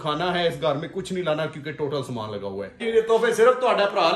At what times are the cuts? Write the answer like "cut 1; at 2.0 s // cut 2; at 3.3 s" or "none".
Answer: cut 1; at 2.8 s